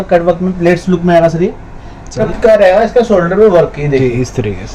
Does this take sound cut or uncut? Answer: cut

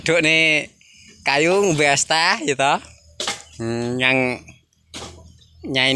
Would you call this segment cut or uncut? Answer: uncut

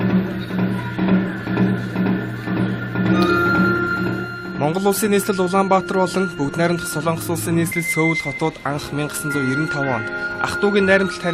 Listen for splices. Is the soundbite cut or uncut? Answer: uncut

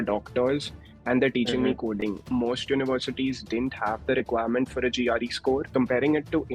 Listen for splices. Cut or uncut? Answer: cut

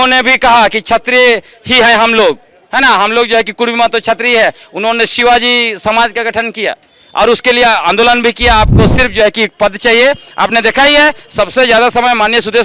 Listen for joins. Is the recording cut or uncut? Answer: cut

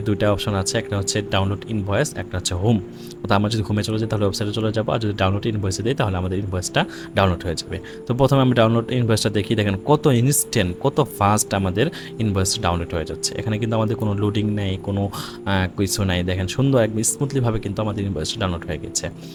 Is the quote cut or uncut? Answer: uncut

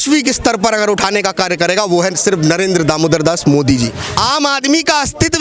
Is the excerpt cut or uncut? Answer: cut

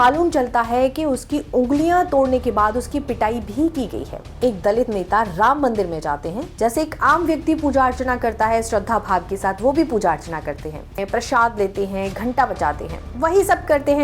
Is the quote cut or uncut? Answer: cut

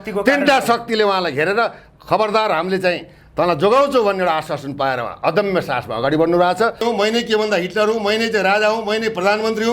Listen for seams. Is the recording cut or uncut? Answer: cut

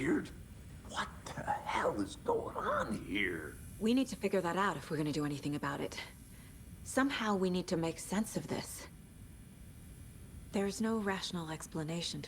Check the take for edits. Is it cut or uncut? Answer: cut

